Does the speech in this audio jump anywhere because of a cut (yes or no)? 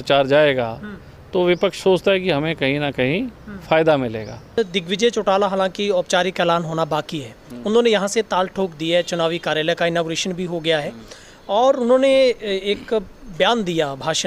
yes